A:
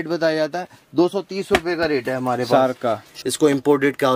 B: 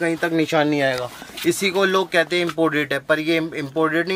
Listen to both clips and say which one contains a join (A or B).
A